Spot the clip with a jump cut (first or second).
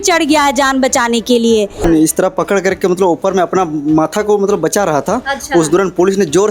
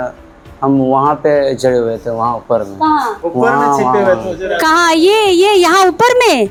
first